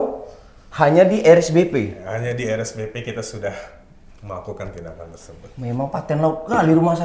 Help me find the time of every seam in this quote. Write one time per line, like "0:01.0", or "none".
none